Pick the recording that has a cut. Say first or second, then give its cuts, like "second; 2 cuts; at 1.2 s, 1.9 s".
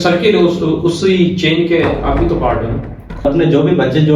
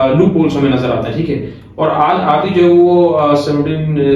first; 1 cut; at 3.2 s